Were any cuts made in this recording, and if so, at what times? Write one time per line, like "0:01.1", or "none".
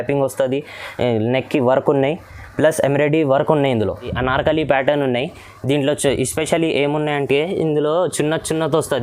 0:04.1